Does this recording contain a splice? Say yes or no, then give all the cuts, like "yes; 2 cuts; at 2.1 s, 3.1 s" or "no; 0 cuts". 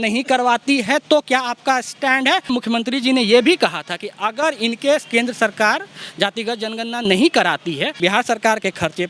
yes; 2 cuts; at 2.5 s, 8.0 s